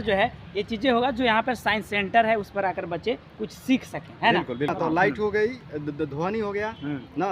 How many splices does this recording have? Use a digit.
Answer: 1